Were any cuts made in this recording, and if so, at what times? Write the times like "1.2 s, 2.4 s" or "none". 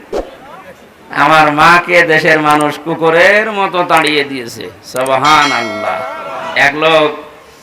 6.5 s